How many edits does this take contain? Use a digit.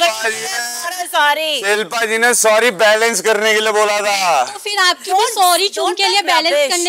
0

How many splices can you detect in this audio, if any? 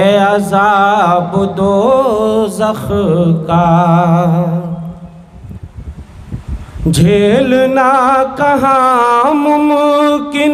0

